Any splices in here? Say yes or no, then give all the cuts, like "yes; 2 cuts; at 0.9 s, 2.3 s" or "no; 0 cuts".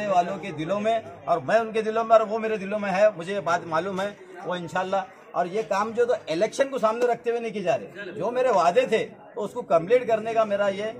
no; 0 cuts